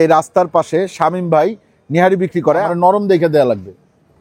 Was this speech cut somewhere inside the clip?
yes; 1 cut; at 2.6 s

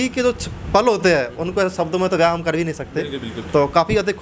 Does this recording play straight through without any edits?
yes; 0 cuts

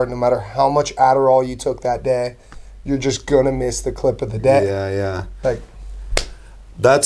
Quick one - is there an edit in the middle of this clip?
no; 0 cuts

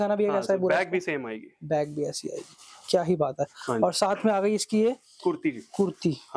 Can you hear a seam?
no; 0 cuts

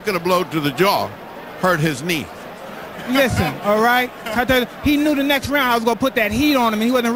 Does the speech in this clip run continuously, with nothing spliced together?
yes; 0 cuts

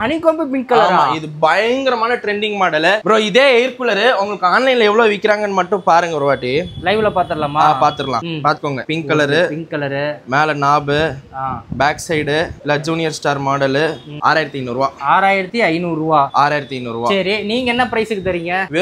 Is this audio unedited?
yes; 0 cuts

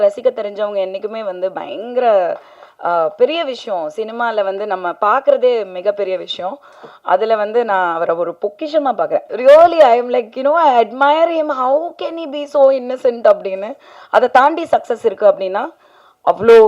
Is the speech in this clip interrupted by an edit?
yes; 1 cut; at 9.3 s

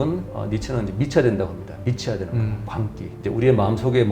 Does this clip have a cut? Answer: yes; 1 cut; at 3.2 s

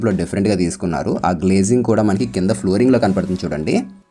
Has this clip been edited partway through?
no; 0 cuts

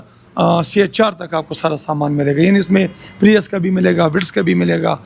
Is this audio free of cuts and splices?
yes; 0 cuts

